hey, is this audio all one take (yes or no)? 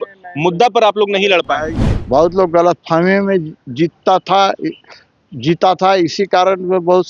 no